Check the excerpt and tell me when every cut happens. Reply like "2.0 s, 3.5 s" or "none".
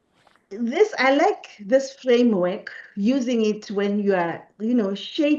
none